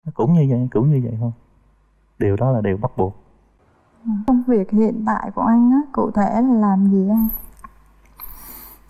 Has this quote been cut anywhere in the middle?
yes; 1 cut; at 4.2 s

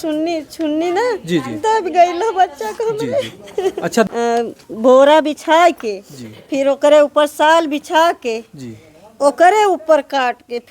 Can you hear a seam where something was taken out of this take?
yes; 1 cut; at 4.1 s

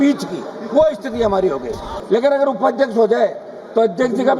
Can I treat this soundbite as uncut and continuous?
no; 1 cut; at 1.9 s

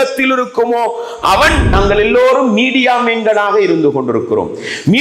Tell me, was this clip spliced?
yes; 1 cut; at 1.7 s

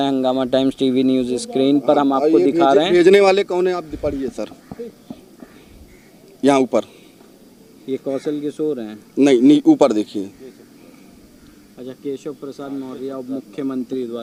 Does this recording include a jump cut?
no; 0 cuts

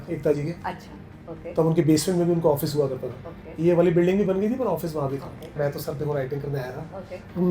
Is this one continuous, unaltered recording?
no; 1 cut; at 5.6 s

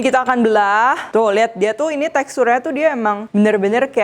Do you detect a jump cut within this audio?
yes; 2 cuts; at 1.0 s, 3.2 s

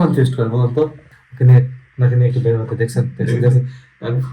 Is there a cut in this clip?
yes; 1 cut; at 1.2 s

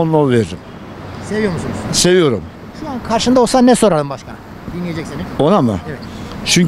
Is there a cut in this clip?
no; 0 cuts

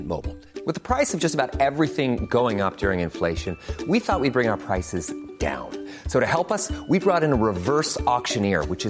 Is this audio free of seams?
yes; 0 cuts

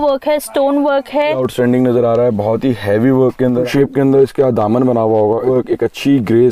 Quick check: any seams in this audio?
yes; 3 cuts; at 1.4 s, 3.7 s, 5.4 s

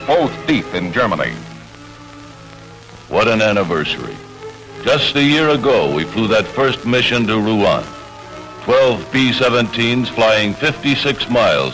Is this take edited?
no; 0 cuts

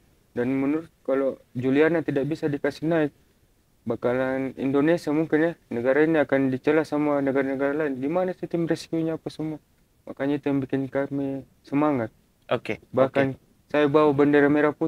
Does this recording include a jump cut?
no; 0 cuts

